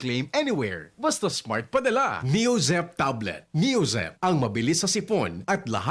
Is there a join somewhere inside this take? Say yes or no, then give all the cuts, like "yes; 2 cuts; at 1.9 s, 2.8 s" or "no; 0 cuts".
yes; 1 cut; at 2.2 s